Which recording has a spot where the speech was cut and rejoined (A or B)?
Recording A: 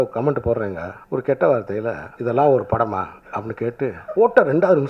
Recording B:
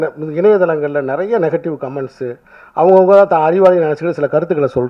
A